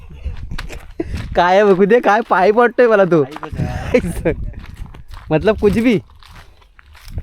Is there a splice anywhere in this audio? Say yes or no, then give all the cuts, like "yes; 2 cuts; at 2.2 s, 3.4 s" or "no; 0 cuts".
yes; 1 cut; at 4.1 s